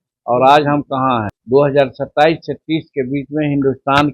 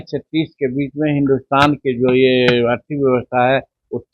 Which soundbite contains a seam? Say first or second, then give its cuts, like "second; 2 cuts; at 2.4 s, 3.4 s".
first; 1 cut; at 1.3 s